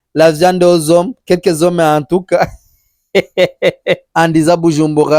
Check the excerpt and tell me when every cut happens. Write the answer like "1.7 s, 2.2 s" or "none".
4.1 s

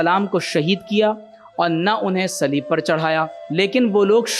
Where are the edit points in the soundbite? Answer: 3.4 s

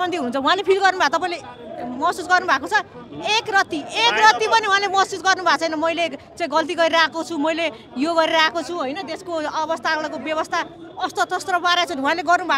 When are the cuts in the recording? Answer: none

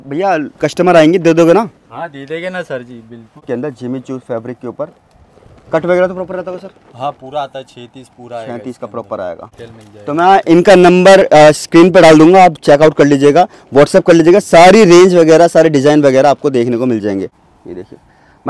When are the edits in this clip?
3.4 s, 9.6 s, 17.3 s

